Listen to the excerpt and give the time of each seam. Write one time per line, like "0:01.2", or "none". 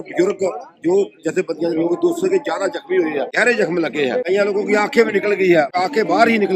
0:03.3
0:04.3
0:05.7